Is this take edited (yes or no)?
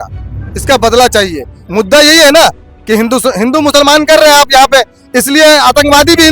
yes